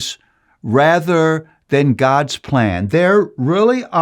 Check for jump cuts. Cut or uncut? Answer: uncut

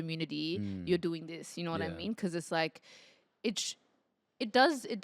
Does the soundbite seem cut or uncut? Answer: uncut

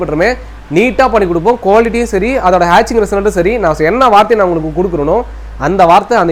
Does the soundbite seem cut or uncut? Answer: uncut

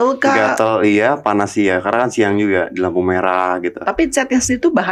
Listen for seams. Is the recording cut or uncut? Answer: uncut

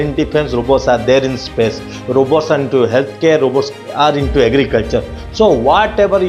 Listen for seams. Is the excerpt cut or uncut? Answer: uncut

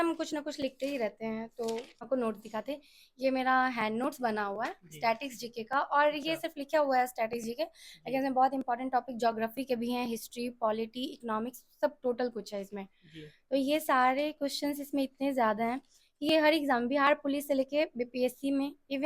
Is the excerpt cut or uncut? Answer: cut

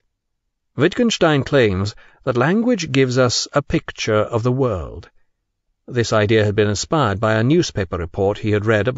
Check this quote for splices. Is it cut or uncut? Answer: uncut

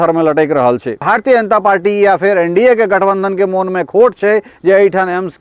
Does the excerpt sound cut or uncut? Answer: cut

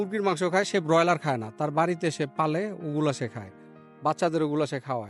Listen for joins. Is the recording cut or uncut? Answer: uncut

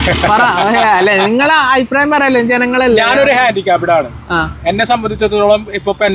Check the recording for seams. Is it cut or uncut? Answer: uncut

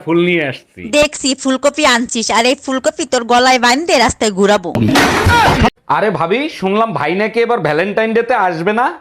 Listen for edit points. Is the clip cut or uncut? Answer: cut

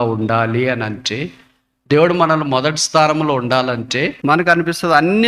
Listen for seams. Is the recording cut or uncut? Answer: cut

